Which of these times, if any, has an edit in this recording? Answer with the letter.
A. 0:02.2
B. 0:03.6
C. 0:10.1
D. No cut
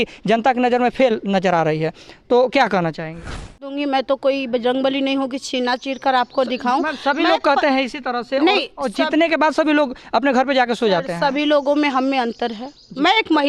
B